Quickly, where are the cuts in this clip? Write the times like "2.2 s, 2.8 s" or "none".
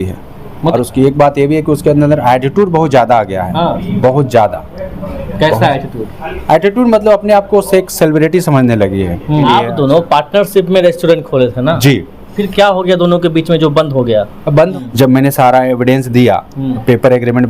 0.7 s, 9.4 s, 14.8 s